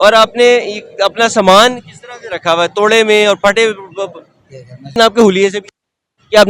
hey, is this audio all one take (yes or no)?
no